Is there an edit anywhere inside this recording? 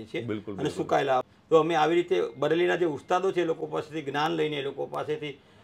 yes; 1 cut; at 1.2 s

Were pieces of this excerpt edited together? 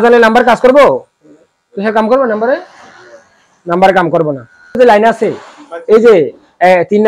yes; 1 cut; at 4.8 s

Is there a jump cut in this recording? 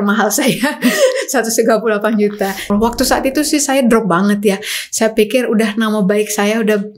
yes; 1 cut; at 2.7 s

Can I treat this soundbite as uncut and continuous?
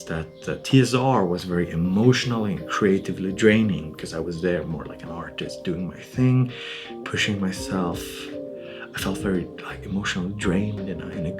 yes; 0 cuts

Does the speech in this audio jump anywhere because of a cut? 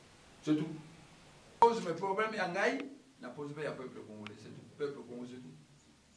yes; 1 cut; at 1.6 s

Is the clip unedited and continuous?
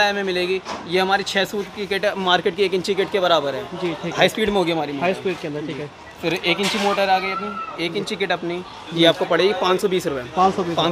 yes; 0 cuts

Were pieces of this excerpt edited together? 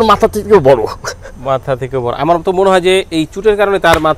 no; 0 cuts

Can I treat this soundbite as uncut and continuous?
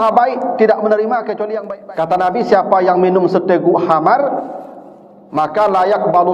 no; 1 cut; at 1.5 s

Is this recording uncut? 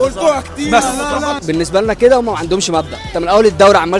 no; 1 cut; at 1.4 s

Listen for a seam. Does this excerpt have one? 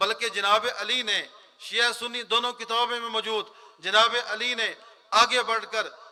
no; 0 cuts

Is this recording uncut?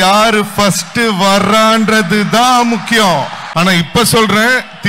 no; 1 cut; at 3.4 s

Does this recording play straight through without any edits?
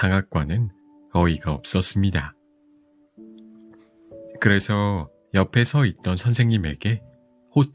yes; 0 cuts

